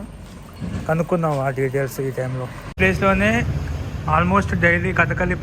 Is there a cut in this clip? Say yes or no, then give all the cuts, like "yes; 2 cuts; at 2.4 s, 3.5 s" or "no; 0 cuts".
yes; 1 cut; at 2.8 s